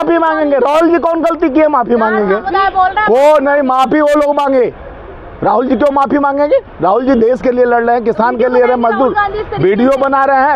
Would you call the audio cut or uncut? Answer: uncut